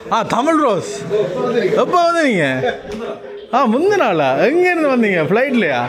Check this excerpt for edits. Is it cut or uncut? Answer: uncut